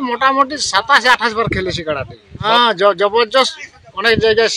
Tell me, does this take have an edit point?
yes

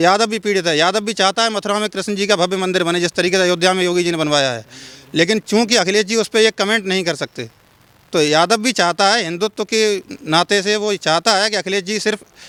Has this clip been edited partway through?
no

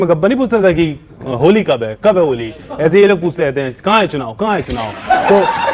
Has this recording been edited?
no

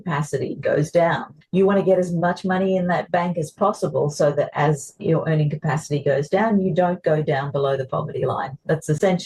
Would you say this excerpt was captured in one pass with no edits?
yes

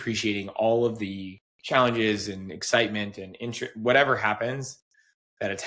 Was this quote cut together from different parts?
no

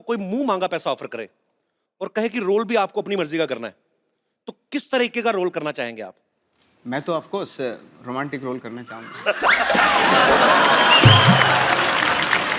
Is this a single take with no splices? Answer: yes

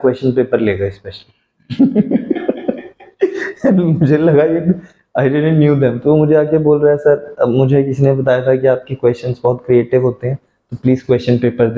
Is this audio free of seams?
yes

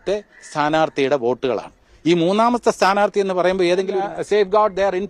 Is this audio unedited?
no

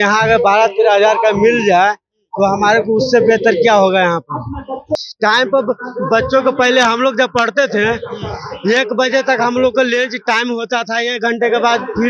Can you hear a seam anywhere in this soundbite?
yes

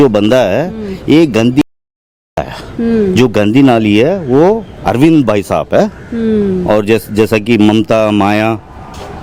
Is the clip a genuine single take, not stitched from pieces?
yes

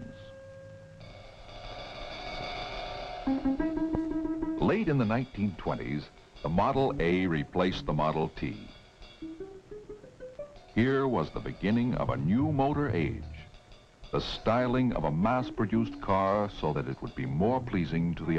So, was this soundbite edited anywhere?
no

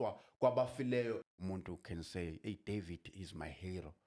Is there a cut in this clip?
yes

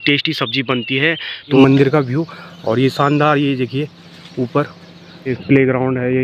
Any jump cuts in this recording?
yes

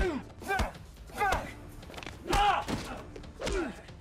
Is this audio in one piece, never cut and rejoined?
no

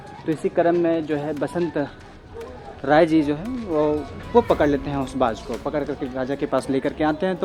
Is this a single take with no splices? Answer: yes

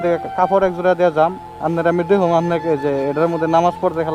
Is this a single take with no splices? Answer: yes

